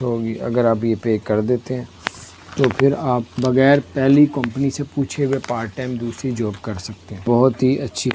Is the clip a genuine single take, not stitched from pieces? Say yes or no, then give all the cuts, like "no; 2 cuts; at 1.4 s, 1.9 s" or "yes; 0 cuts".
no; 1 cut; at 7.3 s